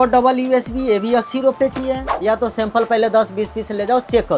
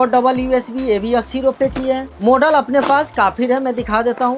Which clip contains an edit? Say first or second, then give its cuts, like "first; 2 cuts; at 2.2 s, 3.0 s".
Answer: first; 1 cut; at 2.1 s